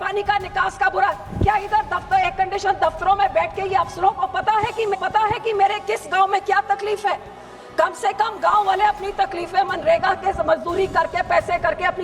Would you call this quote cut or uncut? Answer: uncut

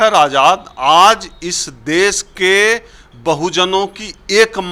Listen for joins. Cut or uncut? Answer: uncut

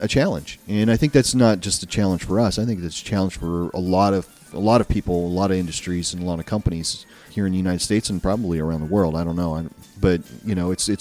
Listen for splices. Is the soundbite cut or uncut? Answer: uncut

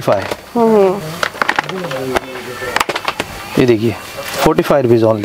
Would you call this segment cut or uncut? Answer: uncut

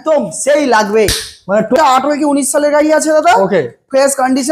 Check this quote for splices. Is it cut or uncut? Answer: cut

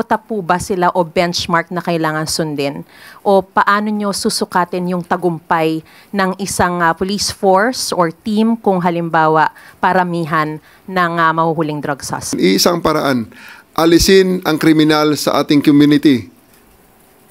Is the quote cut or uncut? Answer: cut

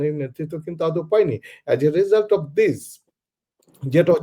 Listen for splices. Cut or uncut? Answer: uncut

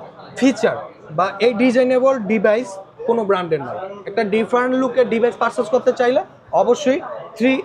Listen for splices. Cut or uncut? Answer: uncut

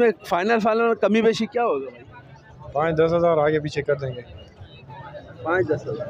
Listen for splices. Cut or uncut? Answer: uncut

